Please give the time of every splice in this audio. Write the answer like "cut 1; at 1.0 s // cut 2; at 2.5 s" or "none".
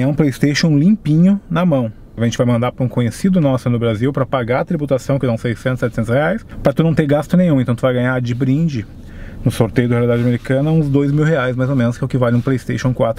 cut 1; at 2.0 s // cut 2; at 6.5 s